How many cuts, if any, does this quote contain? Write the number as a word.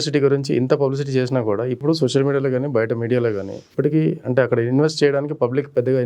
two